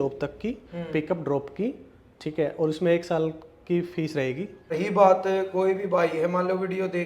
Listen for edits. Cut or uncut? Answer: cut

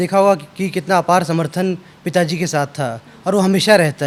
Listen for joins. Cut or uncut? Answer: uncut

